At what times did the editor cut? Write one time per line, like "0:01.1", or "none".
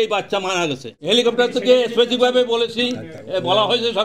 0:00.9